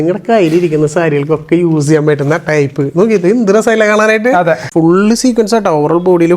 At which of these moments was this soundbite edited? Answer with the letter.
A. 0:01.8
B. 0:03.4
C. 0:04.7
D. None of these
C